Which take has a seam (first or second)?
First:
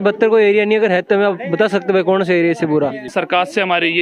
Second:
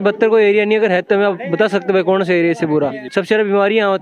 first